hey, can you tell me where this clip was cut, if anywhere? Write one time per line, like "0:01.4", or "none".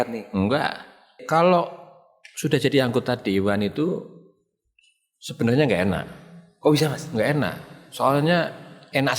0:01.2